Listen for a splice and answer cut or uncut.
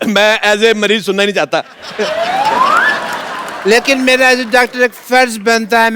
uncut